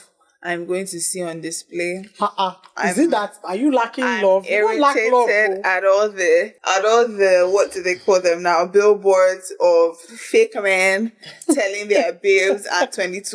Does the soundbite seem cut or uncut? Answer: cut